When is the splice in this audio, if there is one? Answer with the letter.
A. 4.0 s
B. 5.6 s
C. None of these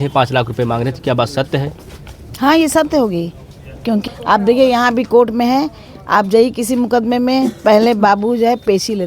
A